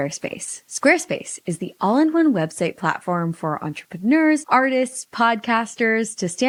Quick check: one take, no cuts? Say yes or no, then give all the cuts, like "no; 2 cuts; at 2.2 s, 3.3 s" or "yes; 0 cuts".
yes; 0 cuts